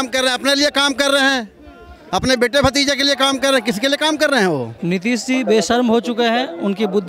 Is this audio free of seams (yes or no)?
no